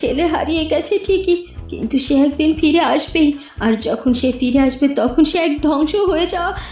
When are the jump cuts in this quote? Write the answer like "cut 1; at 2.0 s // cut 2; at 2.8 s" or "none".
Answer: none